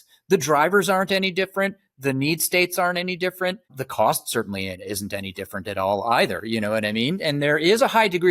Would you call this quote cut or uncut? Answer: cut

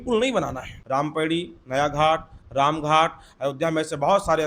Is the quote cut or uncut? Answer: cut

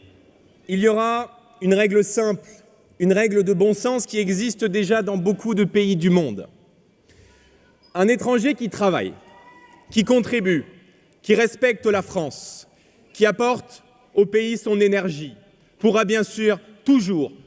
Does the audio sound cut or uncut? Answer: uncut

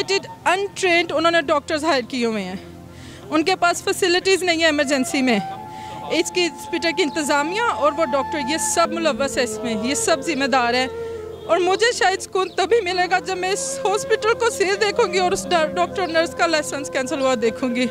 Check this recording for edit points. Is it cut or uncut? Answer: uncut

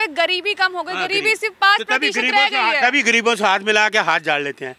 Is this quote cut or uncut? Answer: uncut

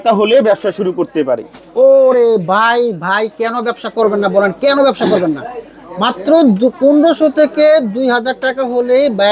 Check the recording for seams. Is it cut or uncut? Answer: uncut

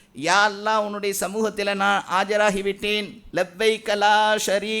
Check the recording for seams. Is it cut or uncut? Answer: cut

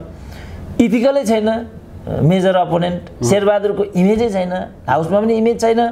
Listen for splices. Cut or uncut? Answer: uncut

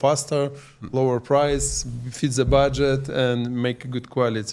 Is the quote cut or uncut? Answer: uncut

